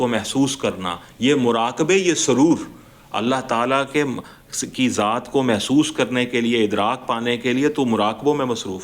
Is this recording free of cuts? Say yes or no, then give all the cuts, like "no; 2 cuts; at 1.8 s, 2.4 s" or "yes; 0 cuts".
yes; 0 cuts